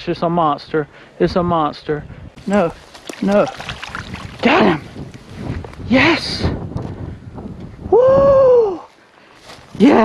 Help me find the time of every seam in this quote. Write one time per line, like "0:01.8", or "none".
0:02.2